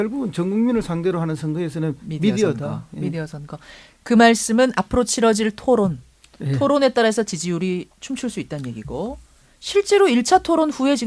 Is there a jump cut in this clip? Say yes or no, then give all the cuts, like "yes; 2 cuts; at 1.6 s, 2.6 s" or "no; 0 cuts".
no; 0 cuts